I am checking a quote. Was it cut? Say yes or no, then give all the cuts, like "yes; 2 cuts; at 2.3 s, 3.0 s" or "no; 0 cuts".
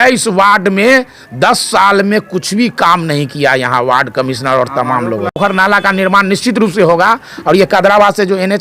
yes; 1 cut; at 5.4 s